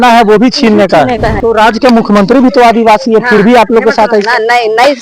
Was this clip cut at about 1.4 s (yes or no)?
yes